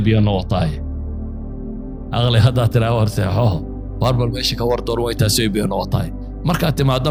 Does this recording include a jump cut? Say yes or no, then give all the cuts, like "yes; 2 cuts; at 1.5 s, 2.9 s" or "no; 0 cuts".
no; 0 cuts